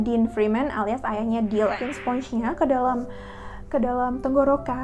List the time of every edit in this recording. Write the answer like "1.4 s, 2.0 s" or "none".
1.9 s